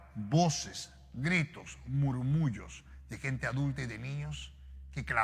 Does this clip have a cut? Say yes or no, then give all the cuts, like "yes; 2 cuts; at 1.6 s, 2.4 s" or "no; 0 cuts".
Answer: no; 0 cuts